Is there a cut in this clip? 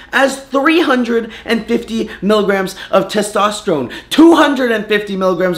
yes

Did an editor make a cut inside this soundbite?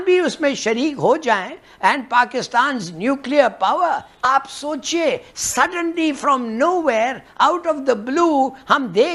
no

